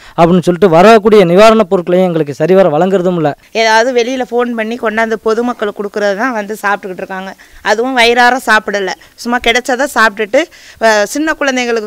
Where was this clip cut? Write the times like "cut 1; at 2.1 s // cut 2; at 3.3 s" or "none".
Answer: cut 1; at 3.4 s